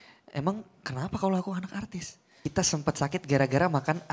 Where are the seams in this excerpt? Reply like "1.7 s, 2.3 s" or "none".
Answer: 2.3 s

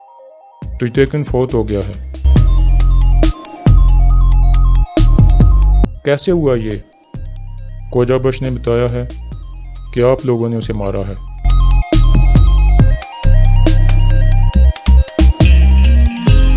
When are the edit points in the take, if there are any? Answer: 13.0 s

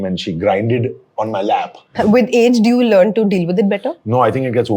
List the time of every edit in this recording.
1.9 s

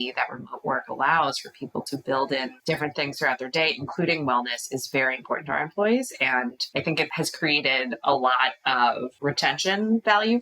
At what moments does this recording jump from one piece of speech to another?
2.5 s, 6.8 s, 9.1 s

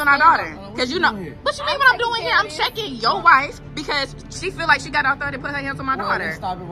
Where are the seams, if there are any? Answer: none

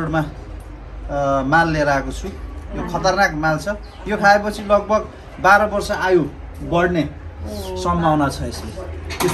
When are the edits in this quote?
none

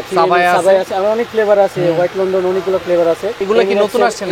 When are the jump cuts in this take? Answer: 3.4 s

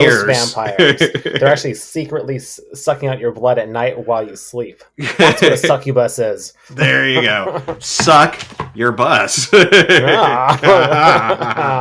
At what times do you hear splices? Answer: none

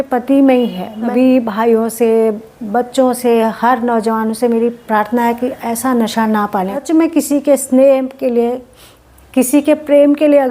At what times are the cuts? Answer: 1.1 s, 6.8 s

